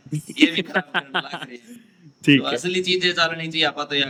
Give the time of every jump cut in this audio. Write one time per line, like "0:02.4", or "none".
none